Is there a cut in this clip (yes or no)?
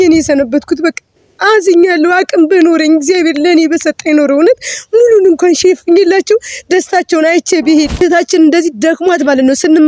yes